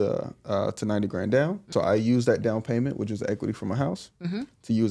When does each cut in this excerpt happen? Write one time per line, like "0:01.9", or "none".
0:01.7